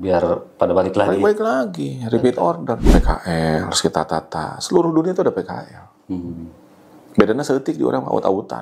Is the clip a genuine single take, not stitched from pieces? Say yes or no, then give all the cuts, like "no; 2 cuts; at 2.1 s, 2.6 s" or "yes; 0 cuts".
no; 1 cut; at 2.8 s